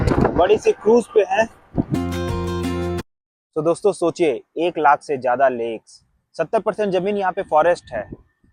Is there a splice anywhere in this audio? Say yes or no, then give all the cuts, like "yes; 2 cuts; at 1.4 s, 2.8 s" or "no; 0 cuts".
yes; 1 cut; at 1.9 s